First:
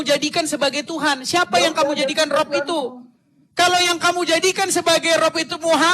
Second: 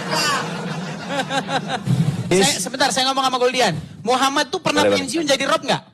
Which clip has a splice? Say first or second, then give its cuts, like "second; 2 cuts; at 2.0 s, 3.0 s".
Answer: second; 1 cut; at 2.3 s